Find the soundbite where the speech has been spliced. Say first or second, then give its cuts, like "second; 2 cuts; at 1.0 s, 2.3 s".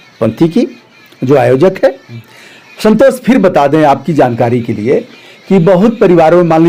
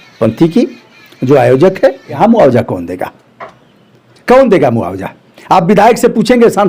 second; 1 cut; at 2.2 s